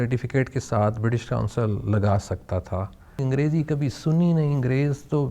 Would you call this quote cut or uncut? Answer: cut